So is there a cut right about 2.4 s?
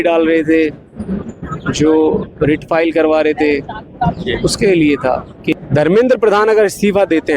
no; 1 cut; at 5.5 s

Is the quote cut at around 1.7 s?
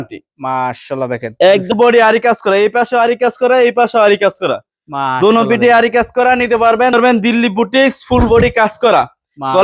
yes; 2 cuts; at 1.7 s, 6.9 s

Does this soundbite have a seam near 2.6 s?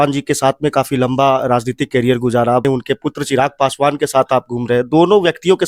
yes; 1 cut; at 2.6 s

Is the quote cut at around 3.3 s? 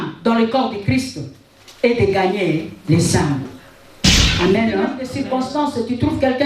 no; 1 cut; at 5.0 s

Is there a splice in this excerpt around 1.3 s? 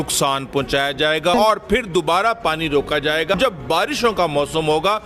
yes; 2 cuts; at 1.3 s, 3.3 s

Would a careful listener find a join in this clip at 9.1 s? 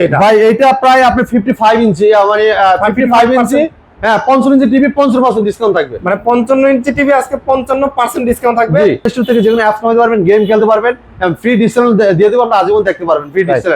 yes; 1 cut; at 9.1 s

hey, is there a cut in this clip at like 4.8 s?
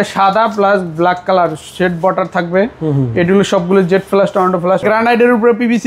yes; 1 cut; at 4.8 s

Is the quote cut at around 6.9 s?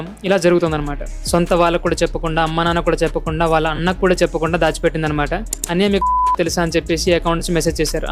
no; 2 cuts; at 1.1 s, 5.6 s

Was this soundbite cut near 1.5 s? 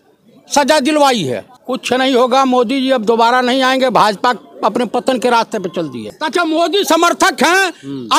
yes; 2 cuts; at 1.5 s, 6.1 s

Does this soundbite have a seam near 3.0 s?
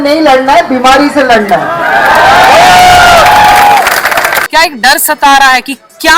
no; 1 cut; at 4.4 s

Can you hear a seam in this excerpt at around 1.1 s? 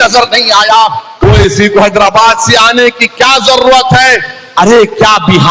yes; 1 cut; at 1.1 s

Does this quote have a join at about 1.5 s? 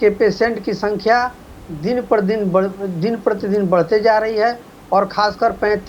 no; 0 cuts

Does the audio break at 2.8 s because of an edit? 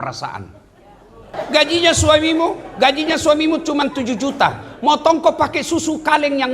no; 1 cut; at 1.3 s

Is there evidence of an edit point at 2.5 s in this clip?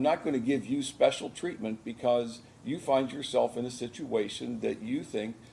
no; 0 cuts

